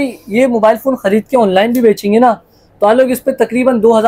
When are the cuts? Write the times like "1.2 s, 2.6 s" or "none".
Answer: none